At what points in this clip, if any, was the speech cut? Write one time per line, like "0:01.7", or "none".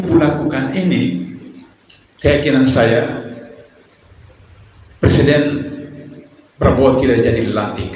none